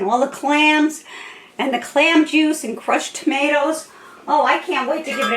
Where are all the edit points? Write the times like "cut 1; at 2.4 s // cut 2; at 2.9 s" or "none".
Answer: none